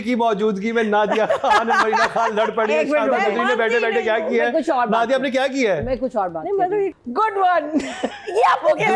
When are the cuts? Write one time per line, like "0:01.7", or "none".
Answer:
0:06.9

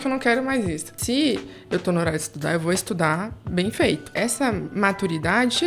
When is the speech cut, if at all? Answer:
0:00.9
0:04.1

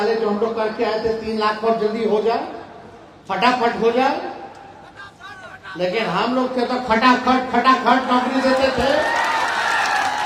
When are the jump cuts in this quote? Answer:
none

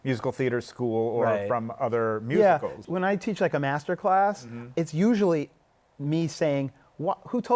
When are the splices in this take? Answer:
0:02.8
0:04.6

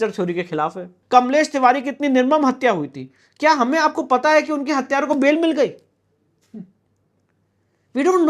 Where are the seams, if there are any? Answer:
0:00.9

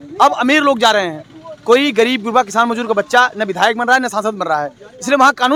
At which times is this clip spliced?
none

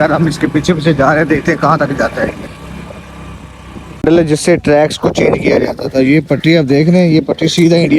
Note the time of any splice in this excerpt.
0:03.9

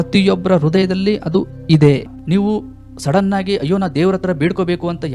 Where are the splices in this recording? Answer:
0:02.1

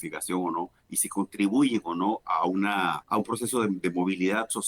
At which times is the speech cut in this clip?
0:03.0

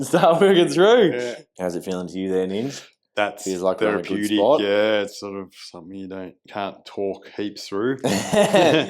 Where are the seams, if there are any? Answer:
0:01.4

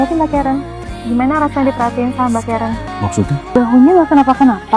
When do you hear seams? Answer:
none

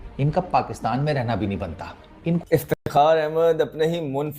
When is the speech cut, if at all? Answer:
0:02.4

